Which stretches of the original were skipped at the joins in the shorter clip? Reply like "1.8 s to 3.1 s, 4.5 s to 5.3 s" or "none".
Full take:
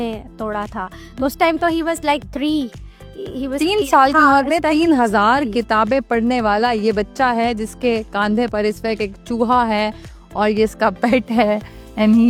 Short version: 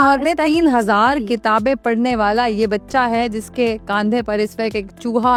none